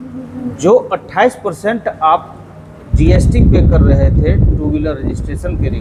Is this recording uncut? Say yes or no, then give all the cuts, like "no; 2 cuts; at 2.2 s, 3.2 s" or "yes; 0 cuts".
yes; 0 cuts